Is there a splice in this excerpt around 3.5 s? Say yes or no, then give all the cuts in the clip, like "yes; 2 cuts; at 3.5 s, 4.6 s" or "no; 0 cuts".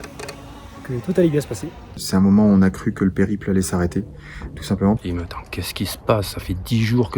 no; 2 cuts; at 2.0 s, 5.0 s